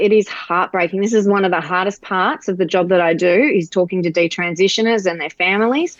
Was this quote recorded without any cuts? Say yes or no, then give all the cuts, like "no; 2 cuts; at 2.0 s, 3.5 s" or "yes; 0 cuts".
yes; 0 cuts